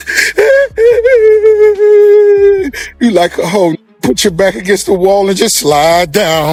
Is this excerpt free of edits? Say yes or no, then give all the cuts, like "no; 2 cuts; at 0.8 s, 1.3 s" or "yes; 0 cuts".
yes; 0 cuts